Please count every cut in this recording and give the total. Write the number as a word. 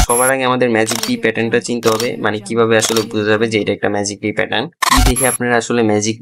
one